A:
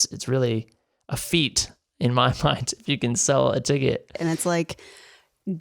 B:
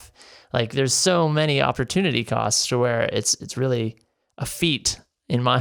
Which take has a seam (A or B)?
A